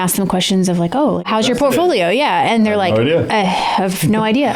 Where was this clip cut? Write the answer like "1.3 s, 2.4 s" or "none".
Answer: 1.3 s

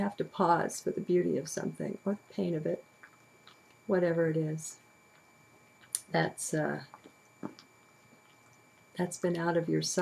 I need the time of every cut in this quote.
6.1 s

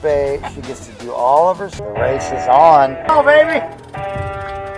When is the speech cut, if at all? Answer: 1.7 s

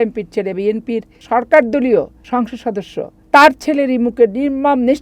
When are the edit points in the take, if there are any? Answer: 1.1 s, 2.6 s

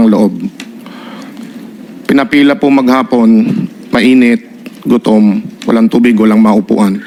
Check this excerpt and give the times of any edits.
none

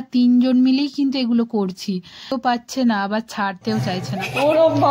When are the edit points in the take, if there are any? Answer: 2.3 s

